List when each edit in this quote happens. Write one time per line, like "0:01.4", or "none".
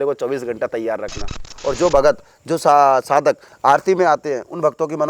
0:01.5